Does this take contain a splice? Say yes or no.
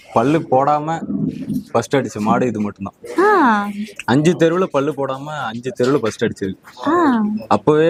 no